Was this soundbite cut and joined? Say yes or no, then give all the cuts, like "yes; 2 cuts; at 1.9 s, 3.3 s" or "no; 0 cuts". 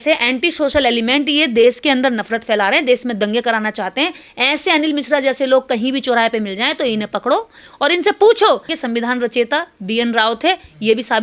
yes; 1 cut; at 8.7 s